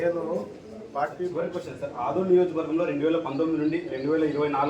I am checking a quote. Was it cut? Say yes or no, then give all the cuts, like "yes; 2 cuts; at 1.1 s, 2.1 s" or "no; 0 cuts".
yes; 1 cut; at 1.3 s